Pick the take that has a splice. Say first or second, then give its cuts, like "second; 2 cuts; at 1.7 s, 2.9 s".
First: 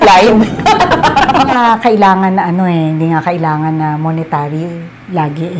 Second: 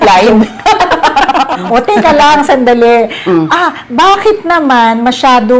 first; 1 cut; at 1.6 s